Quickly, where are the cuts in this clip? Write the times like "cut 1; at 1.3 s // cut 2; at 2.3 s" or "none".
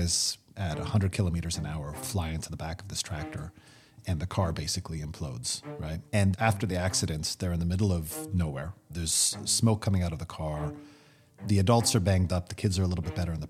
cut 1; at 6.3 s